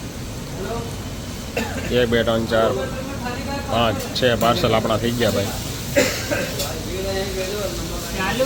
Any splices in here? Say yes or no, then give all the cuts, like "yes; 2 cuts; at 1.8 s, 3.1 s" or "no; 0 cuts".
no; 0 cuts